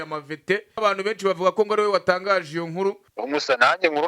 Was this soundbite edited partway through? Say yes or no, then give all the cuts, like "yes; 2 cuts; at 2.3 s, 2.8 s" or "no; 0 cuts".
yes; 2 cuts; at 0.8 s, 3.1 s